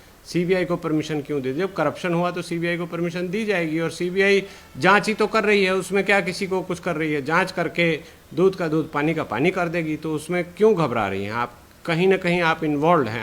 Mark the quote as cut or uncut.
uncut